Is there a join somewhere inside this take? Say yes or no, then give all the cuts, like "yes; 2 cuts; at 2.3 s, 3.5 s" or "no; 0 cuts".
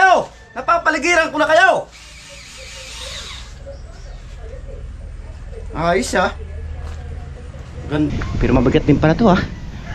yes; 1 cut; at 8.1 s